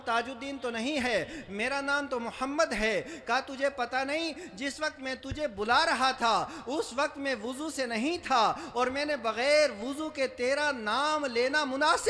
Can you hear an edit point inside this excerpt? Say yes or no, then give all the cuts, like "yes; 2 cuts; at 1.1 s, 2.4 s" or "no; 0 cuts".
no; 0 cuts